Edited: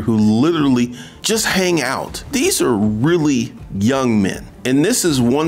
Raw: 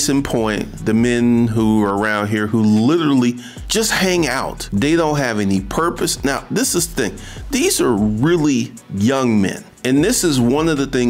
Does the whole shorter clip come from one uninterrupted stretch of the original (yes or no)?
no